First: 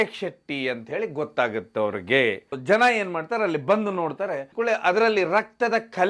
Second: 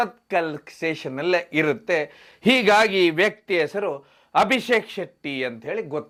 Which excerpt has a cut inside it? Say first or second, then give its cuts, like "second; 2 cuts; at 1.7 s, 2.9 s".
first; 2 cuts; at 2.5 s, 4.5 s